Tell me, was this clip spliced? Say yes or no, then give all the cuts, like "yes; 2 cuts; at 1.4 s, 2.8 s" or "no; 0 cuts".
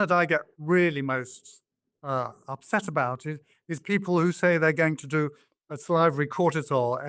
no; 0 cuts